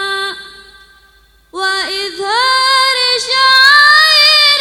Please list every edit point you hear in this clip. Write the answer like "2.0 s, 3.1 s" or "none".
none